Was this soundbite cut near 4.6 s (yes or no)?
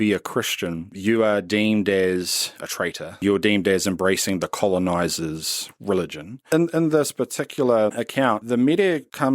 no